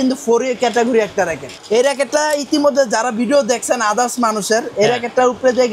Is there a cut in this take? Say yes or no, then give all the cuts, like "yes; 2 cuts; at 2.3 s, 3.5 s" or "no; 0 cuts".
yes; 1 cut; at 1.5 s